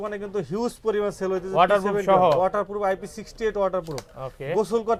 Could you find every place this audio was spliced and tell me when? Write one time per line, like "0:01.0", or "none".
none

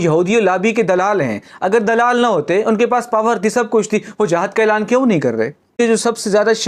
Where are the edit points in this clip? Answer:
0:05.8

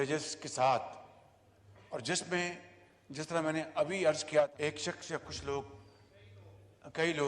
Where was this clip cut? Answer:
0:04.5

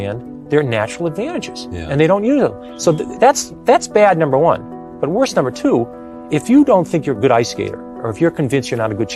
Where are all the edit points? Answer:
none

